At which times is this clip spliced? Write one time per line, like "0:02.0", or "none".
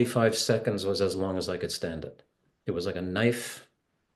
none